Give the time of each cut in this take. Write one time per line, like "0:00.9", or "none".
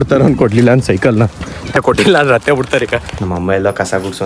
0:01.8
0:03.1